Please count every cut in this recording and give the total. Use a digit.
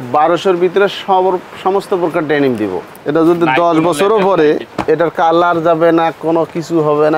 2